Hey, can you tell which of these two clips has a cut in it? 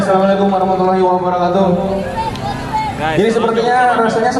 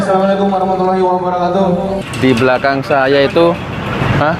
second; 1 cut; at 2.0 s

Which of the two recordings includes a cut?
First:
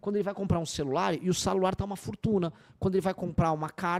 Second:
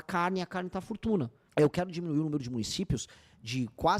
second; 1 cut; at 1.4 s

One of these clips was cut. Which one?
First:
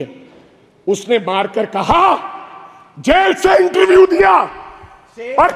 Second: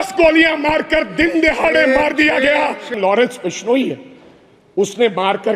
second; 1 cut; at 2.9 s

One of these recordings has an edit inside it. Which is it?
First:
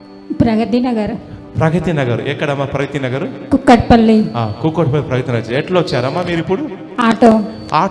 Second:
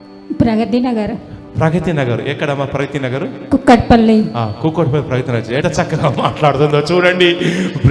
second; 1 cut; at 5.6 s

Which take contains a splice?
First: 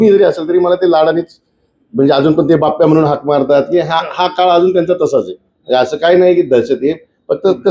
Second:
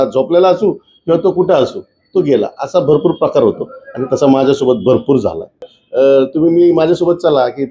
second; 1 cut; at 5.8 s

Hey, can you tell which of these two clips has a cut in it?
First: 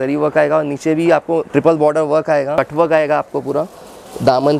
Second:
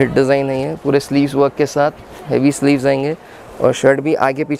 first; 2 cuts; at 1.5 s, 2.5 s

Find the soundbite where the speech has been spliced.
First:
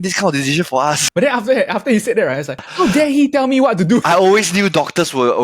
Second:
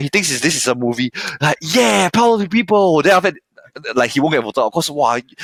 first; 3 cuts; at 1.0 s, 2.7 s, 4.0 s

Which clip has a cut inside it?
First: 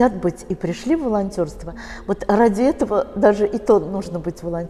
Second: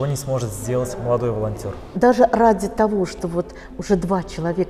second; 1 cut; at 1.8 s

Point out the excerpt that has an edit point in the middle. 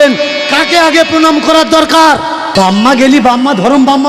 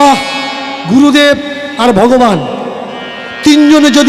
first; 1 cut; at 2.5 s

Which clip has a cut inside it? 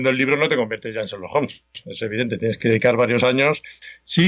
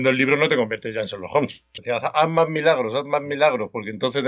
second; 1 cut; at 1.7 s

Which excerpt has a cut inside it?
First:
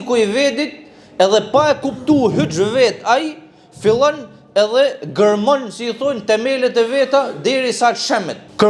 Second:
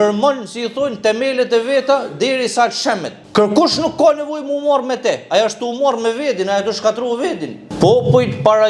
second; 1 cut; at 7.6 s

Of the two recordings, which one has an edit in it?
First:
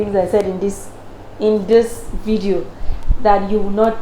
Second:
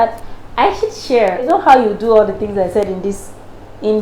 second; 1 cut; at 1.4 s

